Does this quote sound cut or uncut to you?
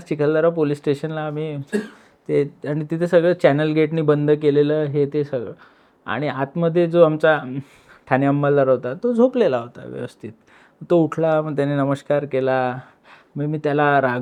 uncut